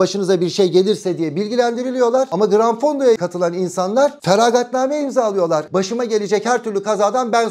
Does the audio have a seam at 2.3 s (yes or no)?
yes